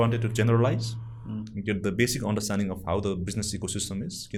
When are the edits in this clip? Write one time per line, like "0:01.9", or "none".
none